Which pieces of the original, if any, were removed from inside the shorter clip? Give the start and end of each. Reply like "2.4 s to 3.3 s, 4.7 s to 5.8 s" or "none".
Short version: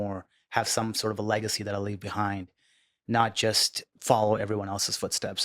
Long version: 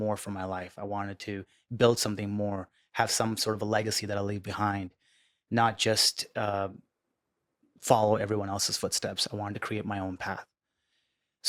6.2 s to 7.5 s